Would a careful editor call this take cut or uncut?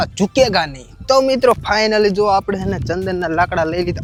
uncut